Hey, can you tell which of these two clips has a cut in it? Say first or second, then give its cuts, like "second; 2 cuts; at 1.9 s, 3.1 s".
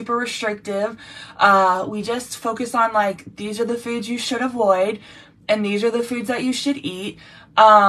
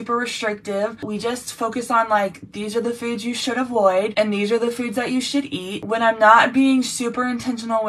second; 3 cuts; at 1.1 s, 4.1 s, 5.8 s